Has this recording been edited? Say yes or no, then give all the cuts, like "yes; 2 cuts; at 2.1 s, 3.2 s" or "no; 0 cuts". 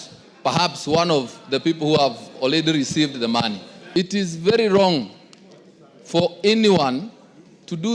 yes; 1 cut; at 3.7 s